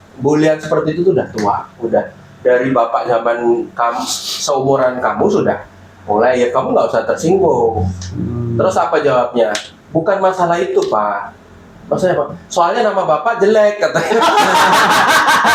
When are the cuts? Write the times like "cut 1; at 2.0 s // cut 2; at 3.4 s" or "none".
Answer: none